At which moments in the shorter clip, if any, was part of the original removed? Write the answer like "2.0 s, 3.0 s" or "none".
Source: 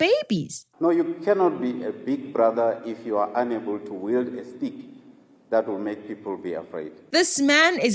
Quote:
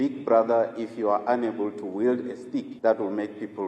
2.7 s